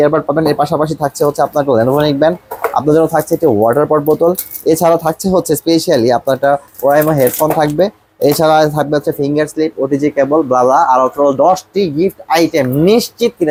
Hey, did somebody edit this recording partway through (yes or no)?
no